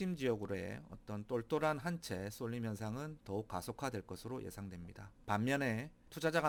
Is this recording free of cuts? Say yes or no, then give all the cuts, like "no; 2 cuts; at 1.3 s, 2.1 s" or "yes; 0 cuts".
yes; 0 cuts